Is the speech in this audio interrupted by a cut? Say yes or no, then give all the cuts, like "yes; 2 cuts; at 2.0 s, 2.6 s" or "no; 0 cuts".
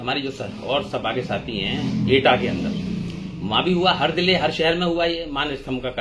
no; 0 cuts